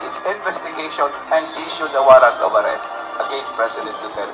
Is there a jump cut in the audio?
yes; 1 cut; at 1.2 s

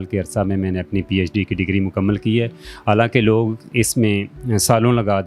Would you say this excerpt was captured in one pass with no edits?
yes; 0 cuts

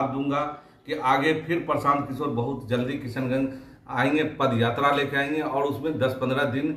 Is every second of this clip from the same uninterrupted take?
yes; 0 cuts

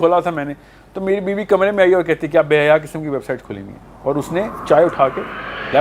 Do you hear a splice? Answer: no; 0 cuts

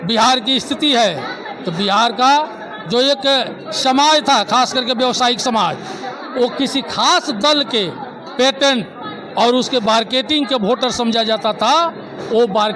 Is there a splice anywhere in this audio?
no; 0 cuts

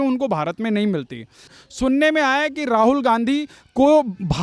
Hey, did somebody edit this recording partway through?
yes; 1 cut; at 1.6 s

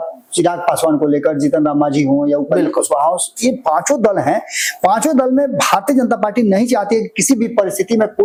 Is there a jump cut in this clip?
no; 0 cuts

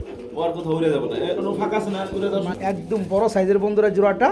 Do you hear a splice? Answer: yes; 1 cut; at 2.5 s

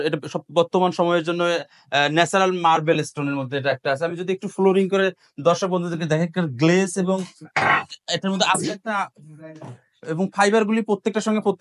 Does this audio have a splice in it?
no; 0 cuts

